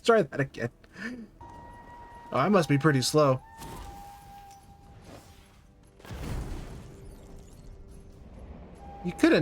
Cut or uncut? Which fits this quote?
cut